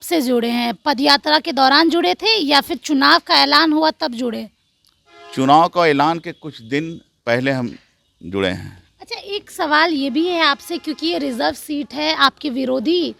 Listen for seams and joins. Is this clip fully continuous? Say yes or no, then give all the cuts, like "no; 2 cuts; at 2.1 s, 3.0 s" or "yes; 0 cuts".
yes; 0 cuts